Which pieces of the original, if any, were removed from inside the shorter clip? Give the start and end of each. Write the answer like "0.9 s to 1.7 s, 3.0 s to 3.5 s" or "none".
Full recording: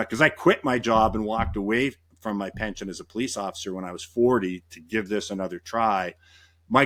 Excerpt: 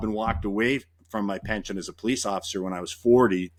none